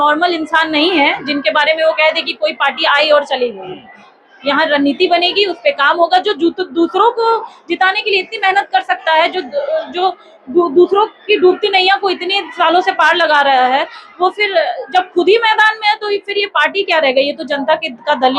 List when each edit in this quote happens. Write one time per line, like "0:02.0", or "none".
none